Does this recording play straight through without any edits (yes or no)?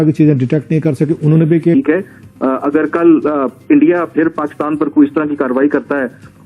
no